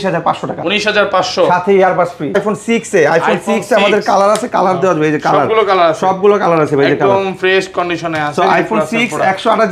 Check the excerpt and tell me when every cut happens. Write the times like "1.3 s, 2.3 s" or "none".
2.3 s